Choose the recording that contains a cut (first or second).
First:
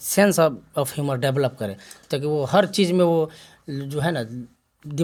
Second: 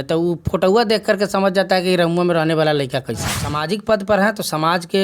second